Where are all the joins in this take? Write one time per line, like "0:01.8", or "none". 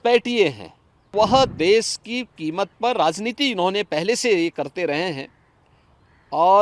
0:01.1